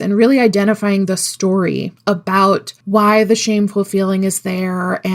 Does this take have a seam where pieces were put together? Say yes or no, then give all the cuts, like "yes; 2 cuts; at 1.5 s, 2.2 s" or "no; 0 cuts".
yes; 2 cuts; at 1.9 s, 2.7 s